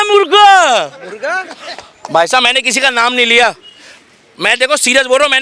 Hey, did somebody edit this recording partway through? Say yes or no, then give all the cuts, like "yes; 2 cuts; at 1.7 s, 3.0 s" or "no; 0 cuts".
no; 0 cuts